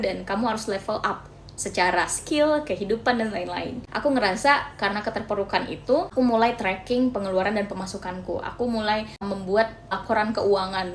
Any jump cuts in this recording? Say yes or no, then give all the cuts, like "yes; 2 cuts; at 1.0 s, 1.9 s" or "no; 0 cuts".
no; 0 cuts